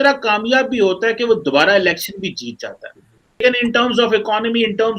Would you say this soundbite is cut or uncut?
cut